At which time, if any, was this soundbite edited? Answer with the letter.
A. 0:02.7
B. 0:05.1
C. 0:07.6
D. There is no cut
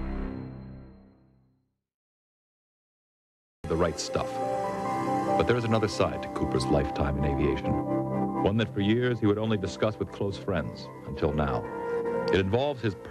D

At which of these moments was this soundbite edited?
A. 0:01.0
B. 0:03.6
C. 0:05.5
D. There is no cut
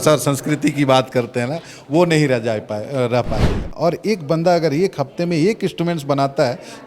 B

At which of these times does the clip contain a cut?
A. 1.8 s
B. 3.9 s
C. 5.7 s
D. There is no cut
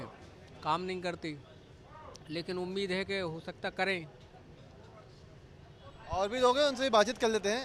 D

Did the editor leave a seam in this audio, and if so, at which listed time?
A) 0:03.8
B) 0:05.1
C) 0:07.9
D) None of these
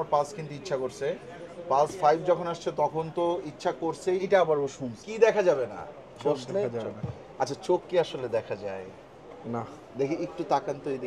B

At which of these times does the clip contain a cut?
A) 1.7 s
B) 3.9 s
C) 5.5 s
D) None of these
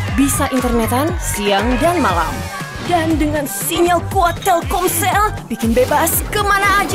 D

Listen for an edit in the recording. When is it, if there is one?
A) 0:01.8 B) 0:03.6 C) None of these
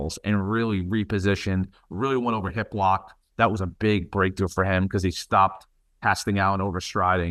C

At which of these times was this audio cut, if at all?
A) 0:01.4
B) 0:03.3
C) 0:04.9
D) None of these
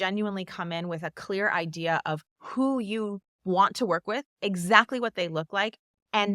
B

